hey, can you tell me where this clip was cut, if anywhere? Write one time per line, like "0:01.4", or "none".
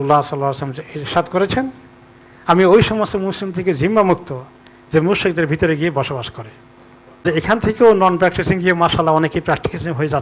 0:07.2

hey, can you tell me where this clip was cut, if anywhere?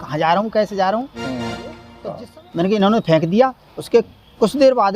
0:01.9

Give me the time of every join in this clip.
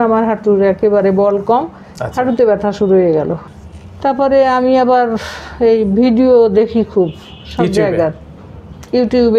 0:03.5

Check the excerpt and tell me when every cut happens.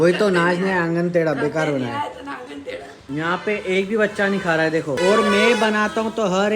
0:03.0
0:05.0

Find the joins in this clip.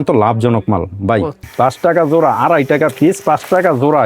0:01.5

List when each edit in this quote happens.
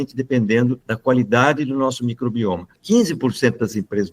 0:00.9
0:02.7

